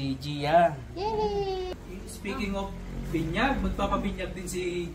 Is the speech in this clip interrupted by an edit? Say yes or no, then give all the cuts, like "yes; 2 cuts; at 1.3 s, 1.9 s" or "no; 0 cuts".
yes; 1 cut; at 1.7 s